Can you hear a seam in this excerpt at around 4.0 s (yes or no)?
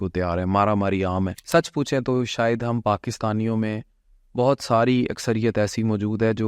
no